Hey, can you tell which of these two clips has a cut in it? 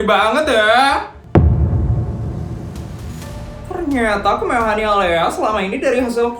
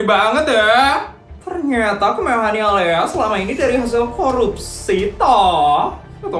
second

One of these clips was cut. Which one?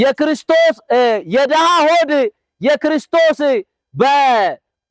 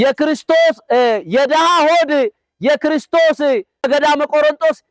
second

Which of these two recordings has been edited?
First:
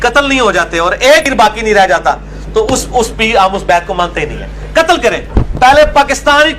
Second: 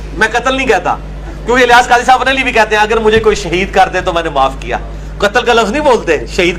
first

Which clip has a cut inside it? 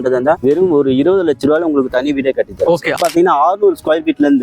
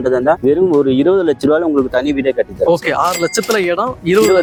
first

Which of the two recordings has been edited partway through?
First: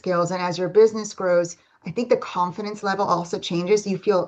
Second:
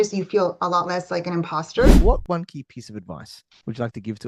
second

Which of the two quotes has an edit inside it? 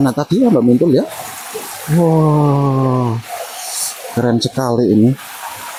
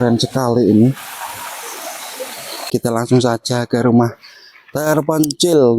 second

